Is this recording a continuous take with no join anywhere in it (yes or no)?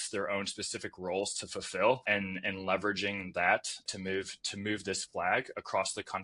no